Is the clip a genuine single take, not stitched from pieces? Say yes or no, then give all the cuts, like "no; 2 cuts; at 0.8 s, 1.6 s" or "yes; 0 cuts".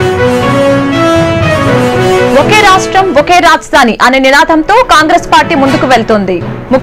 yes; 0 cuts